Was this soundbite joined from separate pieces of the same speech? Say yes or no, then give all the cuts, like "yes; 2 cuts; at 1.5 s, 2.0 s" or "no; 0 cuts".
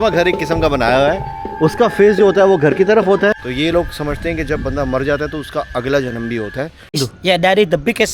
yes; 2 cuts; at 3.5 s, 7.0 s